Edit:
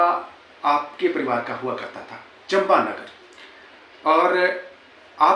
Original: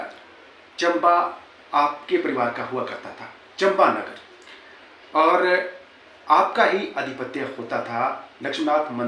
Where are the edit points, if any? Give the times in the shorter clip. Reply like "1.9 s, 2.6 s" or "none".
none